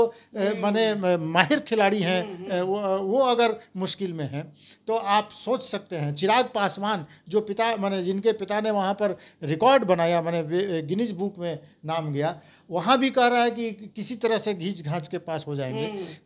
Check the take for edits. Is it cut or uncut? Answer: uncut